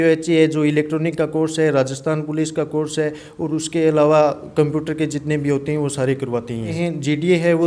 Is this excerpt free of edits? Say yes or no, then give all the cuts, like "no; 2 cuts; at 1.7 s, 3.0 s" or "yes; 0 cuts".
no; 1 cut; at 6.7 s